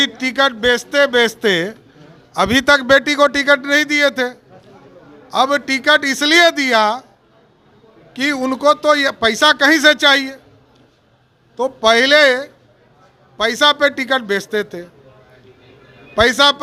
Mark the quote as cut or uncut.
uncut